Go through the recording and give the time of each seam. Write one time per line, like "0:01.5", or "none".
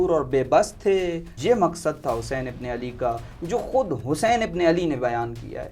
0:01.3